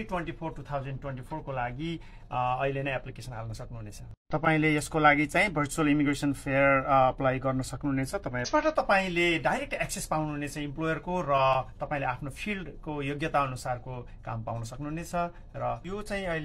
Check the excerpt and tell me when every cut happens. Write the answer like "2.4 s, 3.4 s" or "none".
8.5 s, 15.4 s